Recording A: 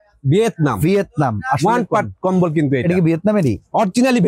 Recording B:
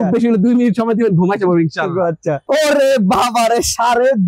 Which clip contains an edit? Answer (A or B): B